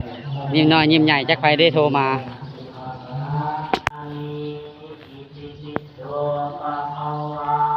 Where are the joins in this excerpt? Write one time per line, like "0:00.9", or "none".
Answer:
0:04.0